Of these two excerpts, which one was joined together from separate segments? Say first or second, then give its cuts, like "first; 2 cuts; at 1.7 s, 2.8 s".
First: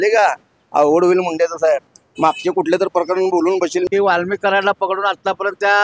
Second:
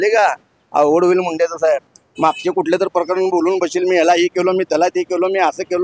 first; 1 cut; at 3.9 s